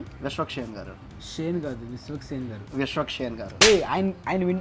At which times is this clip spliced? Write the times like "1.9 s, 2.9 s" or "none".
3.5 s